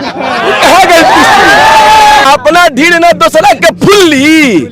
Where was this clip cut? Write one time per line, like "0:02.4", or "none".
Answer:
0:02.2